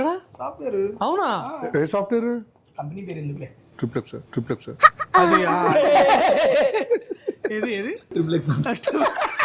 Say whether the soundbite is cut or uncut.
cut